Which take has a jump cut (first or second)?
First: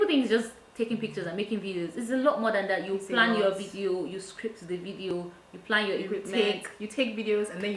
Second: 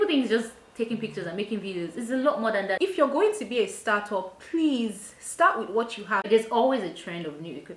second